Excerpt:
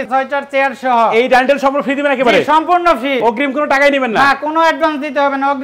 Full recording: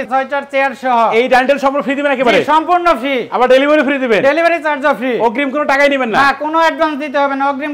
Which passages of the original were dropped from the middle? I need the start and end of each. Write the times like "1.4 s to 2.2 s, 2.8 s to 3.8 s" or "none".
3.2 s to 5.2 s